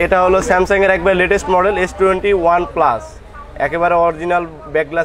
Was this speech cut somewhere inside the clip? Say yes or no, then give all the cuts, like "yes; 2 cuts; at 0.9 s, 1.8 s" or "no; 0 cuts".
no; 0 cuts